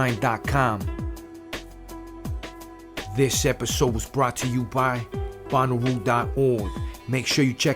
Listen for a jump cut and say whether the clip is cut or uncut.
cut